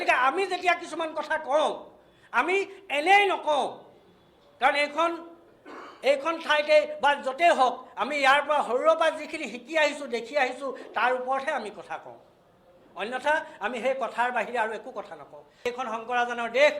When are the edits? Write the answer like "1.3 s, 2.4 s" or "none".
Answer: 15.7 s

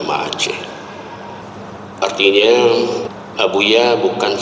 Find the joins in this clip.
1.4 s, 3.0 s

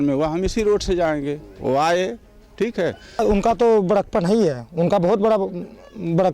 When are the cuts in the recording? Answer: 3.2 s

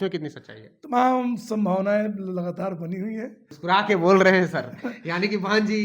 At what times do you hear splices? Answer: 3.5 s

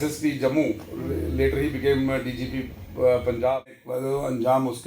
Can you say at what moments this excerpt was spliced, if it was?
3.8 s

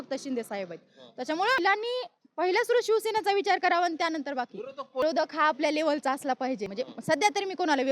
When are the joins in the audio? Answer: 1.6 s, 5.0 s, 6.7 s

